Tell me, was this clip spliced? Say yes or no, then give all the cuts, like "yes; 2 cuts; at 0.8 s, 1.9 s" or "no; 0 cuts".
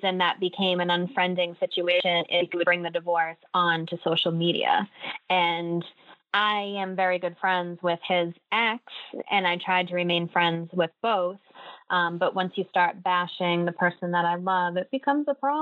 no; 0 cuts